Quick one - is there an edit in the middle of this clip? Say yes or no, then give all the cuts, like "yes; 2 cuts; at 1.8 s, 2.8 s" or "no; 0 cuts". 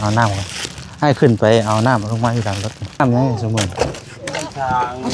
yes; 1 cut; at 3.0 s